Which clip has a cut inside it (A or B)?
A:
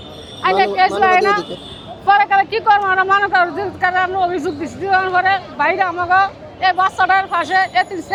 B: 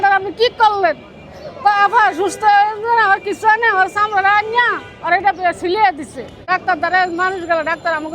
B